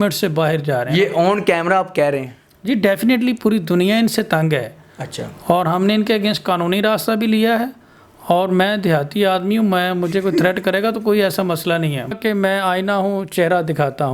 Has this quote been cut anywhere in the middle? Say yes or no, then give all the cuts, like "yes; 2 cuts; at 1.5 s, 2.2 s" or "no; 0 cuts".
yes; 1 cut; at 12.1 s